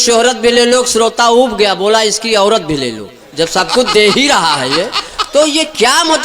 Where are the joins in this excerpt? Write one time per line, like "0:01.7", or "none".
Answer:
none